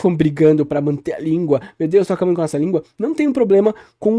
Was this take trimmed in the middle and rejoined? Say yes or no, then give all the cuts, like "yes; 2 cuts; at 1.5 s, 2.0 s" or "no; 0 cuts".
no; 0 cuts